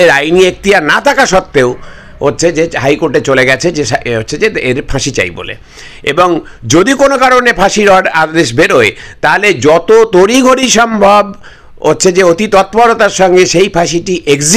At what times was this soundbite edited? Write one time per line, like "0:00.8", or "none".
none